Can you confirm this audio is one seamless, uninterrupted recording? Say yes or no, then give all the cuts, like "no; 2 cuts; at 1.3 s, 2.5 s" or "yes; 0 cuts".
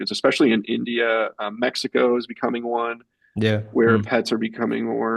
yes; 0 cuts